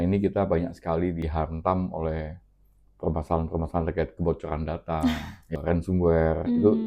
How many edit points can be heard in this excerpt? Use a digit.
2